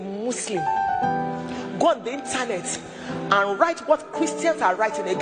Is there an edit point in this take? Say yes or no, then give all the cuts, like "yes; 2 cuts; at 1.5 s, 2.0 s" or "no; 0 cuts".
no; 0 cuts